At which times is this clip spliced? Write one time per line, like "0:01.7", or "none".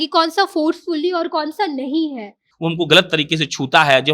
0:02.5